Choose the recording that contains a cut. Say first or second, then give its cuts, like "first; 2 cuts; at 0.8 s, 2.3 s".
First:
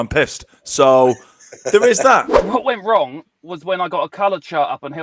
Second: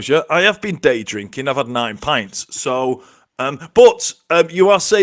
first; 1 cut; at 2.4 s